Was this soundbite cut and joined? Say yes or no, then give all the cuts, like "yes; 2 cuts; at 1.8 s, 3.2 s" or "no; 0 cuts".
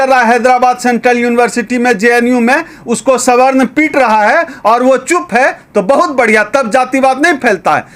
no; 0 cuts